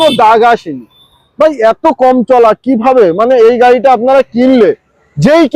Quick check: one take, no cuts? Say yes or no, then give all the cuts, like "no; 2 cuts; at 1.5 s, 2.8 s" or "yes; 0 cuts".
yes; 0 cuts